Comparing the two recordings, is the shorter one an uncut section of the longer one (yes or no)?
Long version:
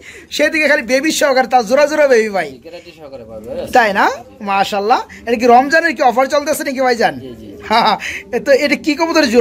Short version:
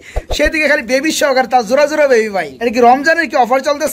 no